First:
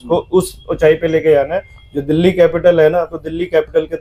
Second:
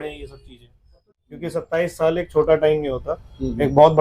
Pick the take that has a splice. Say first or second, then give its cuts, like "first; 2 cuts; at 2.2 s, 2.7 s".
second; 1 cut; at 1.0 s